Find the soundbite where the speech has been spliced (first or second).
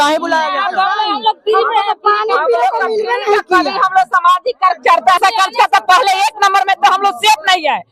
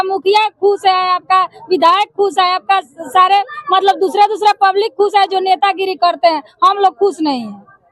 first